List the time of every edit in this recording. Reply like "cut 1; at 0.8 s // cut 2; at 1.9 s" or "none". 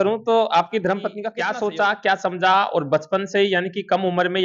cut 1; at 1.3 s